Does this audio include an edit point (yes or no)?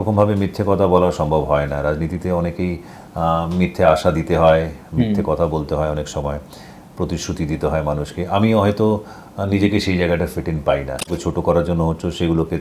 yes